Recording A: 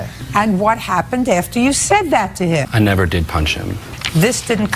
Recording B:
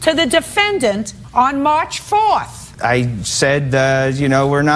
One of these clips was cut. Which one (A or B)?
A